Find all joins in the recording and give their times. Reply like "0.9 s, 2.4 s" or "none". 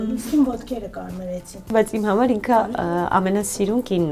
1.7 s